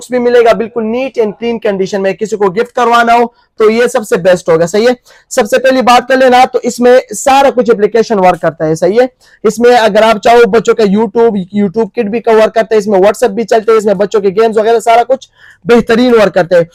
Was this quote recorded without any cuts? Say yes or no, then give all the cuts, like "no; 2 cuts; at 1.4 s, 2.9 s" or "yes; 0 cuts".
yes; 0 cuts